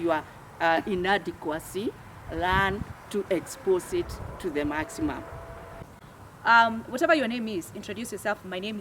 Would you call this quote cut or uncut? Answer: cut